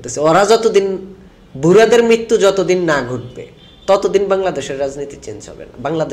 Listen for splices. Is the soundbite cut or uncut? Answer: uncut